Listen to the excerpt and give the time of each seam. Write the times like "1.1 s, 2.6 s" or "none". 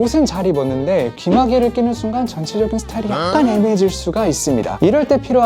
none